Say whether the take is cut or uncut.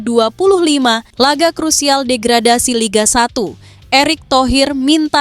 cut